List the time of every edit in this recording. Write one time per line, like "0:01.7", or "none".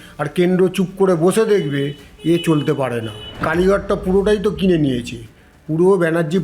0:03.4